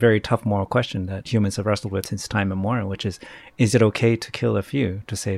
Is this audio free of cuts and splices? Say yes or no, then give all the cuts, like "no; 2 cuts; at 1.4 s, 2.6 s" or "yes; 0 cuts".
no; 2 cuts; at 1.2 s, 2.1 s